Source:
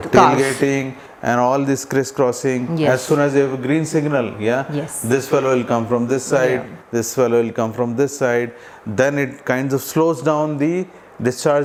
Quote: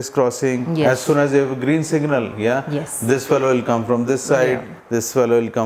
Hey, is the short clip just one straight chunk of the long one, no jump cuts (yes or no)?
yes